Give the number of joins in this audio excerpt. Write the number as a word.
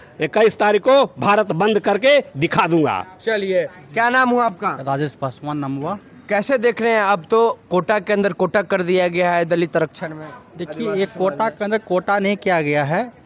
zero